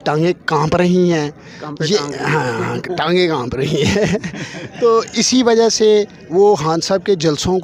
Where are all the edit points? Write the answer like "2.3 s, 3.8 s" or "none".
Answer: none